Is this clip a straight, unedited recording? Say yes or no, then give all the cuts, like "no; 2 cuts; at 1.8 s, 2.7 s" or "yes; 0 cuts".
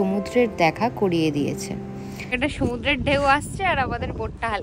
no; 1 cut; at 2.4 s